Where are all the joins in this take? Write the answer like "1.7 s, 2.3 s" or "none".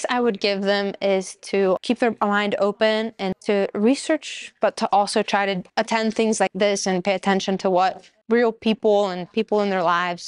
1.8 s, 3.4 s, 5.6 s, 6.5 s, 8.2 s